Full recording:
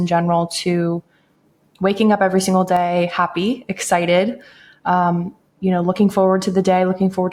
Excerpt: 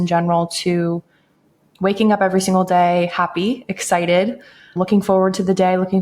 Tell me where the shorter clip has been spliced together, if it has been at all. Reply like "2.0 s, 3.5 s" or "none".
4.8 s

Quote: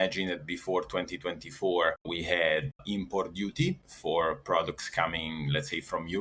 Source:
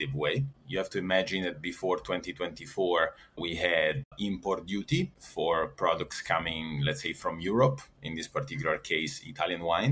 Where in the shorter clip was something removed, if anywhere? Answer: 2.1 s

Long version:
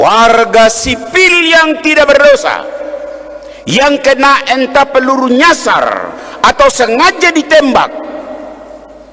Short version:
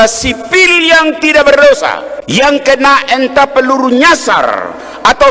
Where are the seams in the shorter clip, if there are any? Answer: 2.1 s

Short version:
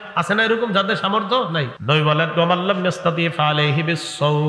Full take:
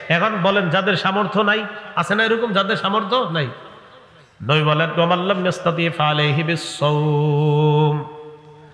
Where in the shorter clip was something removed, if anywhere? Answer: 1.7 s

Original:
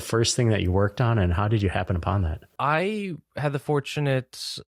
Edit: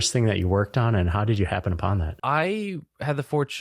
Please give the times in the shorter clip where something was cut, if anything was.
2.1 s

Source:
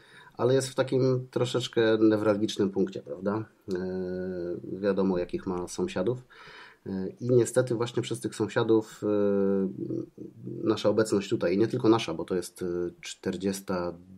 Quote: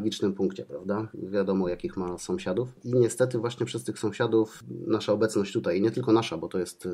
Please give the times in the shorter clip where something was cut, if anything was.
1.2 s, 2.8 s, 4.6 s

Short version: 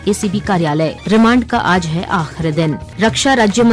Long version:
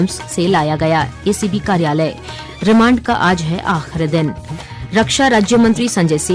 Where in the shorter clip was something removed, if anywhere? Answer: 1.0 s, 2.9 s

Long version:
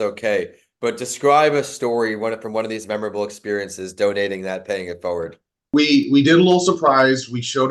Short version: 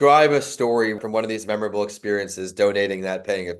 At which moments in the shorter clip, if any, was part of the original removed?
1.0 s

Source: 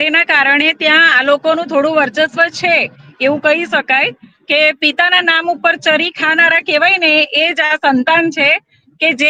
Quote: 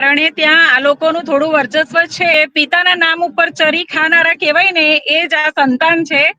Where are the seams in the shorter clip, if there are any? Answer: 2.3 s

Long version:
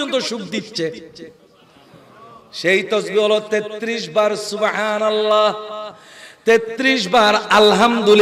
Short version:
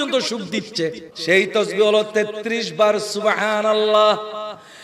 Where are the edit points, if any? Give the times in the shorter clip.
1.1 s

